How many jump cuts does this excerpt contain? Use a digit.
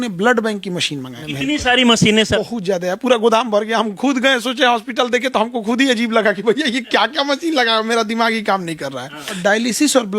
3